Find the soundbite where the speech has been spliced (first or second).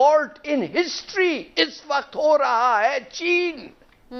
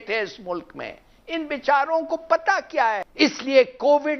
second